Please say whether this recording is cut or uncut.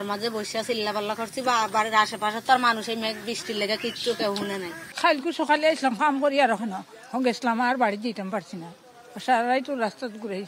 cut